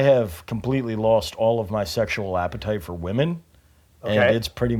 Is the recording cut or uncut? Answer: uncut